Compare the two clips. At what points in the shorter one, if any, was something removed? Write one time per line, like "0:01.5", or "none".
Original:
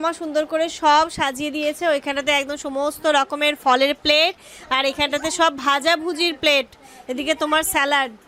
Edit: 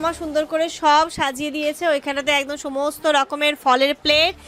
none